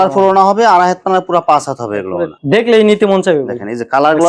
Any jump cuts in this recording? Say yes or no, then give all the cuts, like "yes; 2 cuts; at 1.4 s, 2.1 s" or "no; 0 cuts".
no; 0 cuts